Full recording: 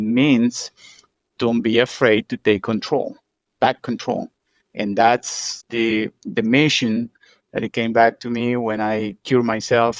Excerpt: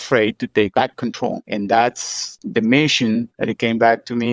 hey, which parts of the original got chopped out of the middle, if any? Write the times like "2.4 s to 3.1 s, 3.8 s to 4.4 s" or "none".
2.7 s to 4.1 s, 5.6 s to 6.2 s, 7.1 s to 7.5 s

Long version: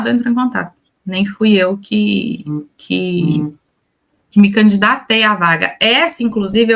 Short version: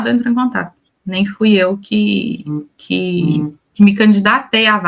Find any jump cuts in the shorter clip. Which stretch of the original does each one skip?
3.6 s to 4.2 s

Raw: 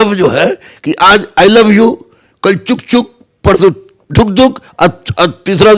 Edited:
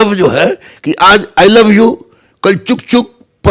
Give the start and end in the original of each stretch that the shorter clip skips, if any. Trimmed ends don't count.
none

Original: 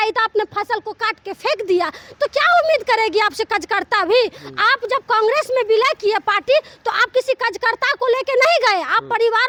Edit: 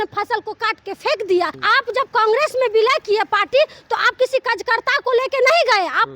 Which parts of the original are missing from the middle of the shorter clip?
2.0 s to 4.6 s

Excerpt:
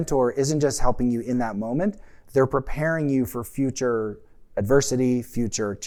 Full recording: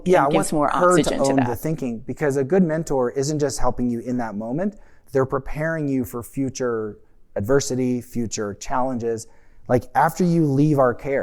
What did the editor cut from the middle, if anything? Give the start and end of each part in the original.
none

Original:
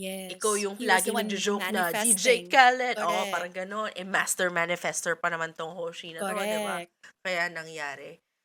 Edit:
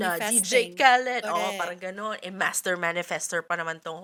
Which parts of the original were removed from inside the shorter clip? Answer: none

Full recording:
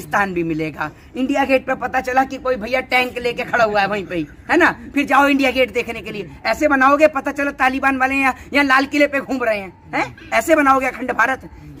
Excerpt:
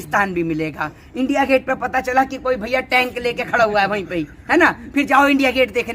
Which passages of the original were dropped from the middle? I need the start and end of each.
none

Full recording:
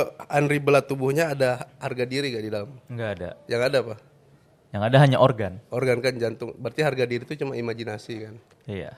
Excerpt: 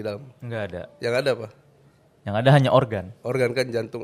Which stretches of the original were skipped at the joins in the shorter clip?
none

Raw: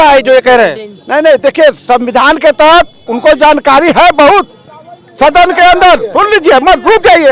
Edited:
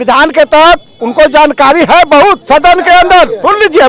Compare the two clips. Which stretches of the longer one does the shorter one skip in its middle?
4.5 s to 5.1 s

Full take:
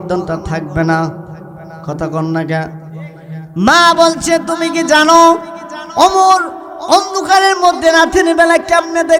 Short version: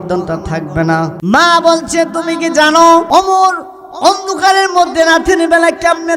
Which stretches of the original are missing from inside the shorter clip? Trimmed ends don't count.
1.2 s to 3.5 s, 5.4 s to 5.9 s

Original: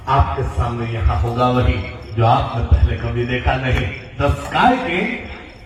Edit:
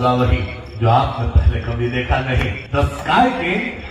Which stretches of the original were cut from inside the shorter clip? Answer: 4.0 s to 4.1 s

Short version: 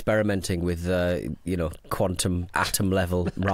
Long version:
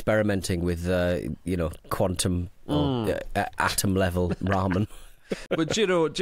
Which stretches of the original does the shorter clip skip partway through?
2.5 s to 3.5 s

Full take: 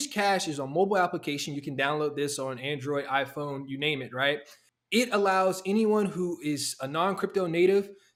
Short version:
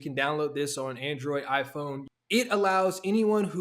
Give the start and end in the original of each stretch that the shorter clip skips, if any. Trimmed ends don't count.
3.7 s to 4.7 s

